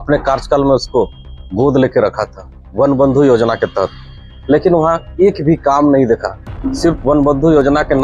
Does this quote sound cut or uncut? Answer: uncut